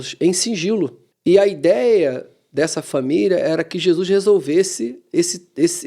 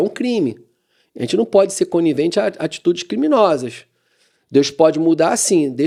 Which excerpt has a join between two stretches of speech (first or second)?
first